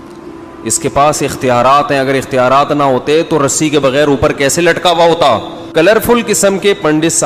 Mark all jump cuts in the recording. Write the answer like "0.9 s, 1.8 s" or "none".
5.6 s